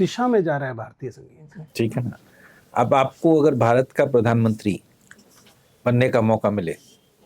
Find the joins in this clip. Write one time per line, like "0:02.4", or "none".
0:01.6